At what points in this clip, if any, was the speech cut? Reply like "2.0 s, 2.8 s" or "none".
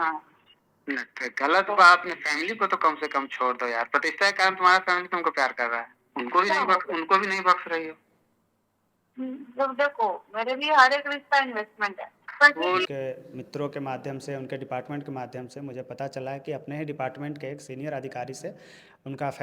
12.9 s

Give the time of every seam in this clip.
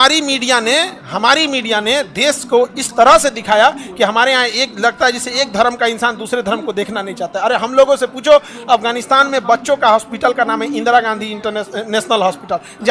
none

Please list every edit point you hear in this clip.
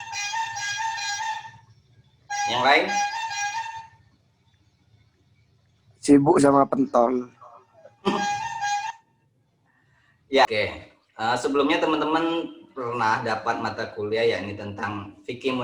10.5 s

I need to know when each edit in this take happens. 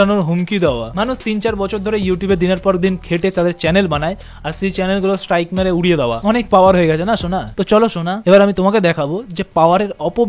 none

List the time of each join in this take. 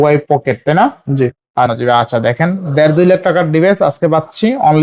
1.7 s

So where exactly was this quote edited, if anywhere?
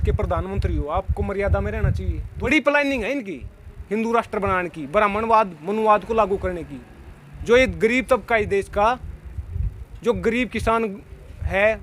2.5 s

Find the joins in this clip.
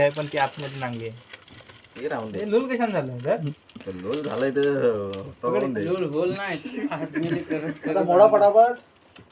none

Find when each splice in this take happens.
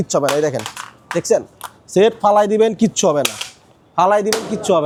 none

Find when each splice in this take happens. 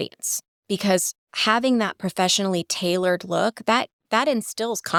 none

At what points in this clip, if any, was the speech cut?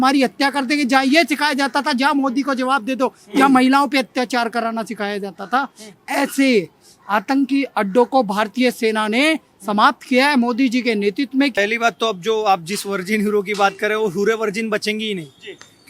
11.5 s

